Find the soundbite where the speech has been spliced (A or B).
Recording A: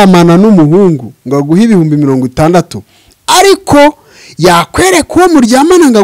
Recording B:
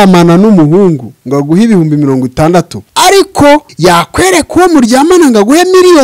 B